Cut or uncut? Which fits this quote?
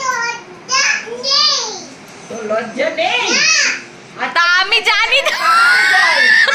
uncut